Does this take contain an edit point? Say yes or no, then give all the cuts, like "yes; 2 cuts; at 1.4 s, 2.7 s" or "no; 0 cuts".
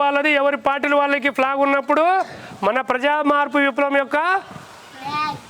no; 0 cuts